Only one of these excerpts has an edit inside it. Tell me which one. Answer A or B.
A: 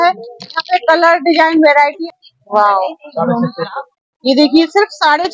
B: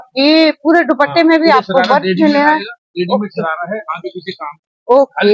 A